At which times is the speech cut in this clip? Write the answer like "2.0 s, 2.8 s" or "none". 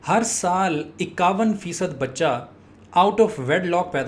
none